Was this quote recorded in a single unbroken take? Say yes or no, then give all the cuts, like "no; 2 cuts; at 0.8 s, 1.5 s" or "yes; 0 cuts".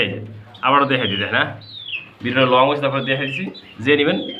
yes; 0 cuts